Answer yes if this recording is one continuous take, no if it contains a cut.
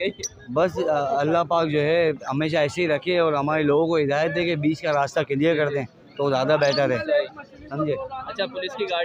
yes